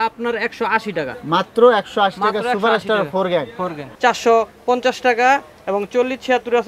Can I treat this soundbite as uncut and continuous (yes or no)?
no